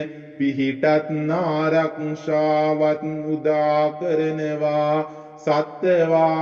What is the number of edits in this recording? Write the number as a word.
one